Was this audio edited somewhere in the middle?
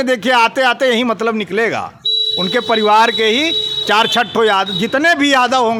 no; 0 cuts

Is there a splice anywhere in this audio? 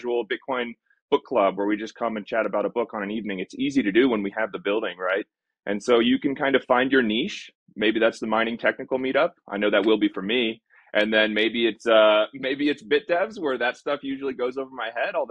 no; 0 cuts

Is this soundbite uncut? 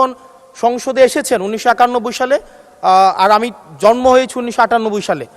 yes; 0 cuts

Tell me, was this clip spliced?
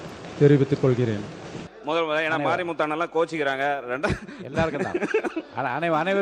yes; 1 cut; at 1.7 s

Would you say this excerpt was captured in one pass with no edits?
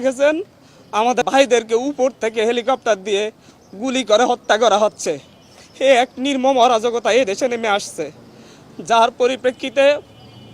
no; 1 cut; at 1.2 s

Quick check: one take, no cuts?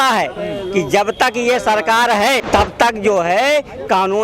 no; 1 cut; at 2.4 s

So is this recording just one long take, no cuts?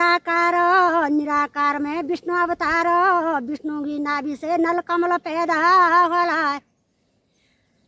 yes; 0 cuts

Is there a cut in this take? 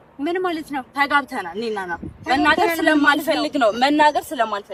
no; 0 cuts

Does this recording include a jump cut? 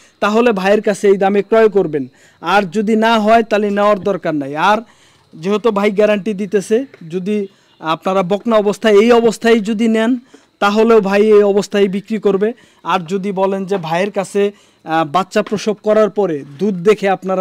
no; 0 cuts

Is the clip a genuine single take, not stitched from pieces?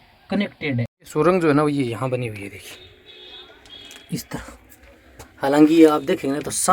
no; 1 cut; at 1.0 s

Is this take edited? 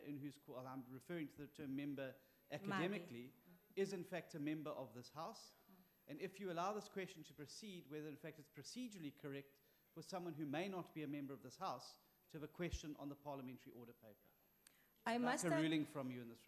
yes; 1 cut; at 11.3 s

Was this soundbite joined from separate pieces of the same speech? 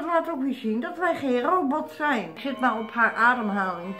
yes; 1 cut; at 2.4 s

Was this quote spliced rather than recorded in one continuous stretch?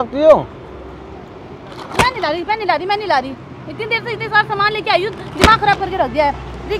no; 0 cuts

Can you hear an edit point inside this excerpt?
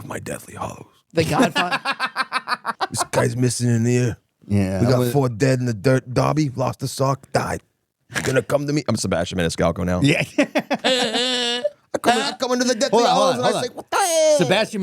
yes; 1 cut; at 2.7 s

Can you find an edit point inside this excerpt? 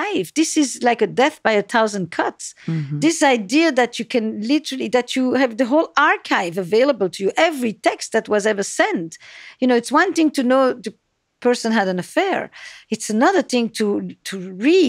no; 0 cuts

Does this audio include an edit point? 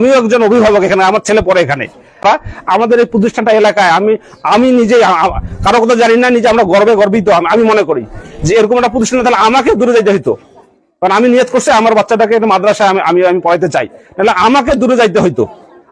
yes; 1 cut; at 2.2 s

